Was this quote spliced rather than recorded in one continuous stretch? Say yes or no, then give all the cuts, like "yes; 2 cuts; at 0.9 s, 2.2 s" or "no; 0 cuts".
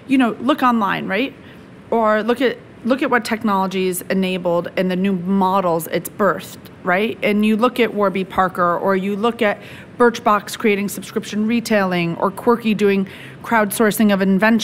no; 0 cuts